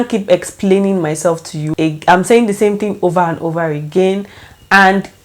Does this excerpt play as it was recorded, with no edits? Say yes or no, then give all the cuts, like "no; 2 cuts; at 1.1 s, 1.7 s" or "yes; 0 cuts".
no; 1 cut; at 1.6 s